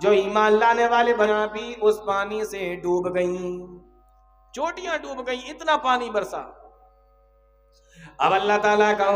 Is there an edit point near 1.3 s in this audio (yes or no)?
yes